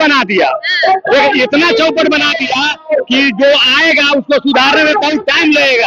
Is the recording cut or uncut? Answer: uncut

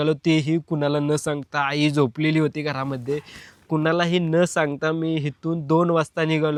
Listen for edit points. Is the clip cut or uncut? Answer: uncut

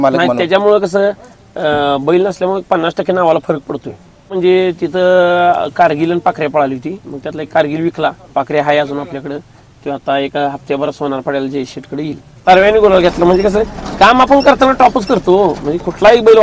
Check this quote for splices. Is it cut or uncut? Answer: cut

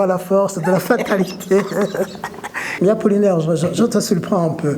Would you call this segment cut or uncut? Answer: cut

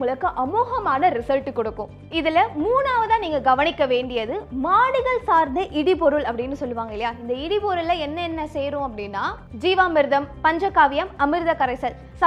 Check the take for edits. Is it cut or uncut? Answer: uncut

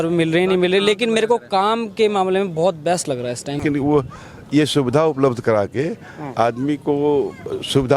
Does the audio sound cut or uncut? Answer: cut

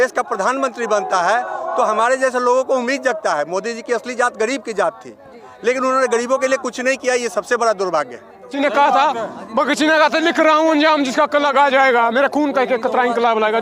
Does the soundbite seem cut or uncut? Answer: cut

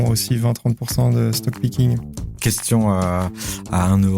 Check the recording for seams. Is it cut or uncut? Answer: cut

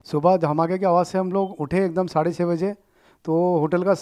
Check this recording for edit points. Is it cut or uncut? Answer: uncut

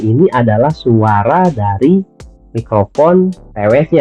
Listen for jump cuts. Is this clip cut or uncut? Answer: uncut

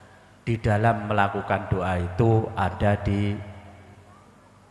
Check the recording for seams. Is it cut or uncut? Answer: uncut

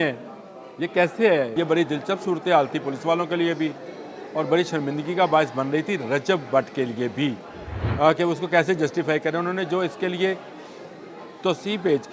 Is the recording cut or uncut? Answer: cut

